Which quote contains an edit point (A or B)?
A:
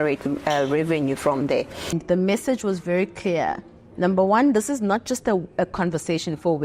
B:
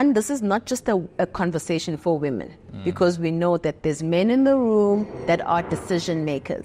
A